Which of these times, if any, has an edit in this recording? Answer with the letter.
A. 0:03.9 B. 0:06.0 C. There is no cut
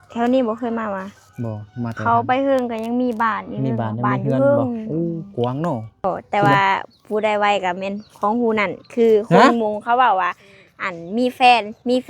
B